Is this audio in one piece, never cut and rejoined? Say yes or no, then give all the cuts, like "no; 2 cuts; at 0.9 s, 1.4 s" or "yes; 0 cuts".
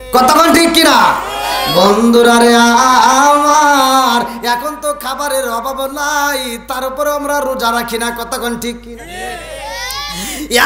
yes; 0 cuts